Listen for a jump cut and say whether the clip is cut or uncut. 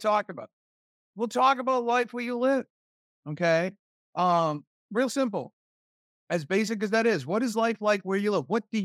uncut